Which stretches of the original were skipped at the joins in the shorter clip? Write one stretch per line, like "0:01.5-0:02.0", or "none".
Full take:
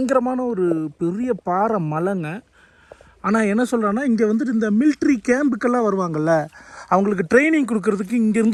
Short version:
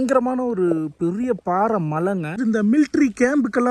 0:02.4-0:04.5

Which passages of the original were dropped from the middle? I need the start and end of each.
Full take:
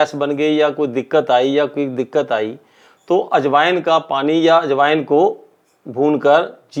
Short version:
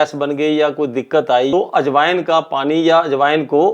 0:01.5-0:03.1

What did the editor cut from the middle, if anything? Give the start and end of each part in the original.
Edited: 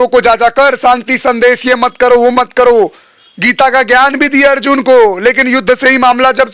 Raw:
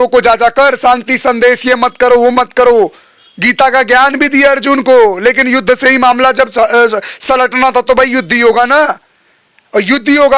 none

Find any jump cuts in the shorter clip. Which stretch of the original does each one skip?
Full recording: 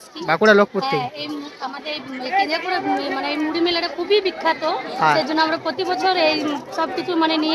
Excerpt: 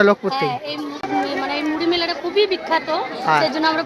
0:01.6-0:02.8

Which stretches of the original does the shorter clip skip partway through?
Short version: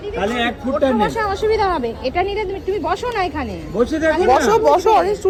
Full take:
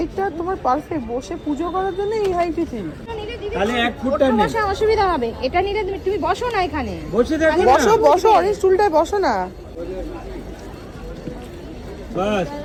none

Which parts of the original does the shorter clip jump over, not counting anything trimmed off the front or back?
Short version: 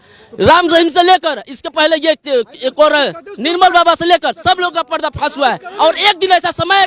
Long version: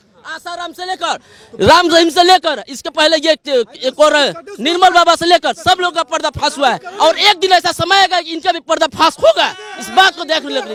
none

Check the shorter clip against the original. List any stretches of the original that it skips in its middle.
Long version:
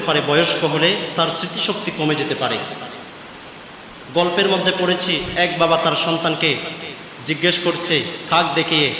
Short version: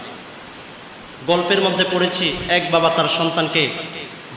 none

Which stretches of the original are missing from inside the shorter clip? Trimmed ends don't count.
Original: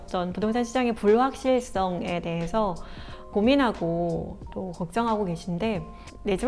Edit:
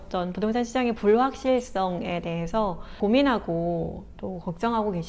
0:02.9-0:03.2

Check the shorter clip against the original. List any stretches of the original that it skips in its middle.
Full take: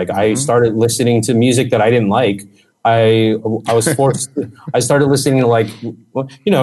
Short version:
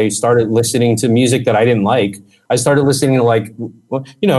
0:02.5-0:04.5

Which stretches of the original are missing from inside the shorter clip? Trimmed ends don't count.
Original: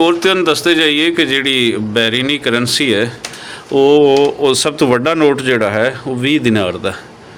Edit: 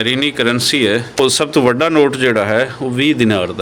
0:03.2-0:04.4

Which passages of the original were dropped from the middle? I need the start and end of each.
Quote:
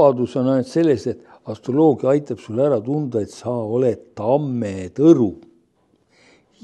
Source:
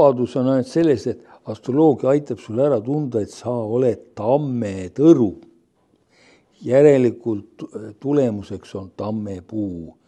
none

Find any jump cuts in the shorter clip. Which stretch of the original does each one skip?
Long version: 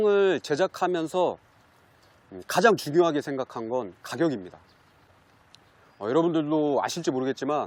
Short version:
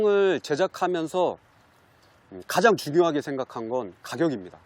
none

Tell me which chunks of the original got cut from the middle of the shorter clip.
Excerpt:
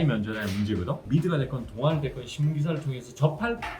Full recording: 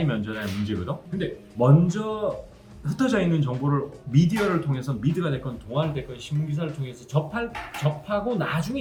0:01.0-0:04.9

